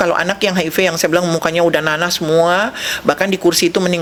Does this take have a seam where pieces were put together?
no; 0 cuts

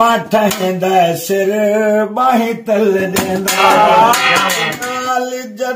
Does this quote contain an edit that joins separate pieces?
yes; 1 cut; at 4.8 s

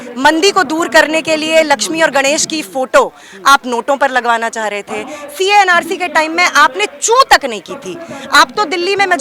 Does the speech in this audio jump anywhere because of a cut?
no; 0 cuts

